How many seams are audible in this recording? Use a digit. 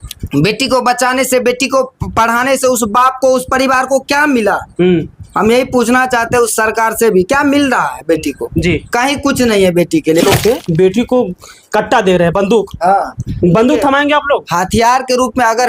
1